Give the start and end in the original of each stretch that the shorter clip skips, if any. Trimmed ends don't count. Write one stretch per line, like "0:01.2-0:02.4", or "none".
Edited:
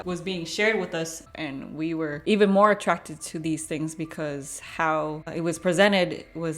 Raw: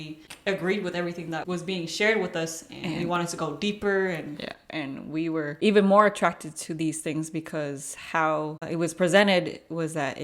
0:02.7-0:04.6